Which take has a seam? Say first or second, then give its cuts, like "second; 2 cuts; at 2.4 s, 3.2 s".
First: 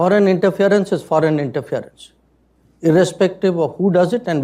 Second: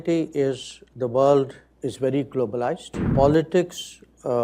second; 1 cut; at 3.1 s